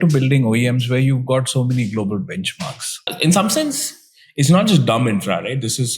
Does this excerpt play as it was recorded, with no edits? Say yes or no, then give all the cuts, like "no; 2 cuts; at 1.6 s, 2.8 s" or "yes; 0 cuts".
no; 1 cut; at 3.1 s